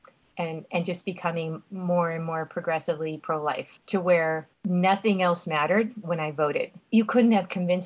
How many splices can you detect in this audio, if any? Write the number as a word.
three